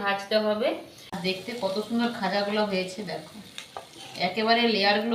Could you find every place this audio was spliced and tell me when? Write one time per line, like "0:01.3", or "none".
0:01.2

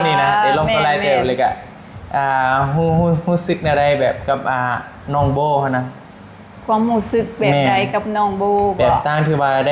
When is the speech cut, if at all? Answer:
none

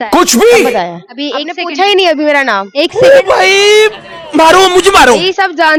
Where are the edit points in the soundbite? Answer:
none

